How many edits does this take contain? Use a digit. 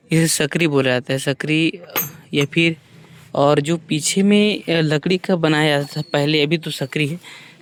0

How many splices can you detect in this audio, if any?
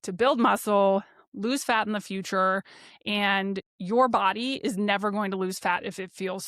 1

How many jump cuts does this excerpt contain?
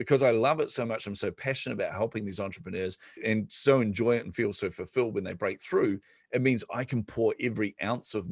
1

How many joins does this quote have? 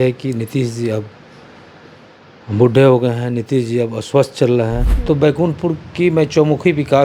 1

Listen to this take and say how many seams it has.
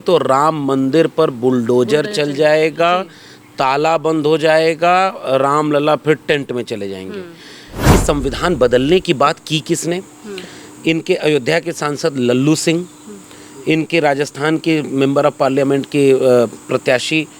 1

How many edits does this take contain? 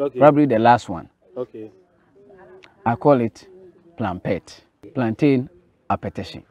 1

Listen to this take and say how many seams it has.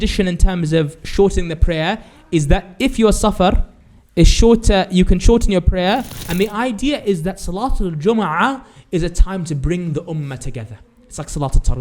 1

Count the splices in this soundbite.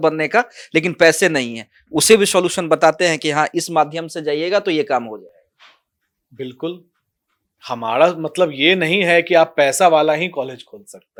0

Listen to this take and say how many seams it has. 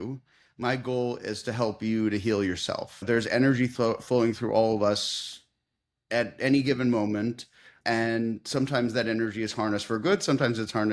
1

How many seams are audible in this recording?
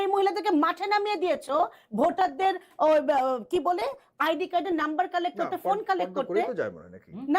0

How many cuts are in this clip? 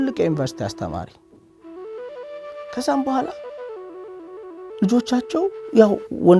0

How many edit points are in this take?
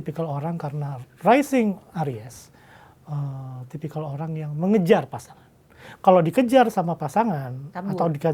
0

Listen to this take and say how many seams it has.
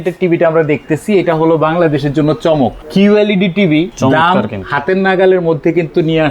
2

